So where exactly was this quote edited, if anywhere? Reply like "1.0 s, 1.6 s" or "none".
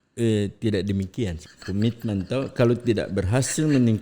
1.4 s